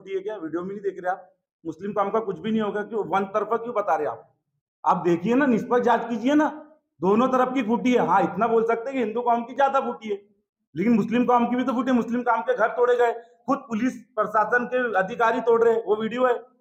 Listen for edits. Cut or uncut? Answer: uncut